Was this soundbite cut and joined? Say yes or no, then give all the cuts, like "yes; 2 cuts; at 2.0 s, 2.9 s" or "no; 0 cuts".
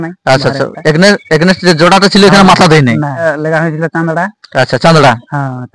yes; 1 cut; at 3.2 s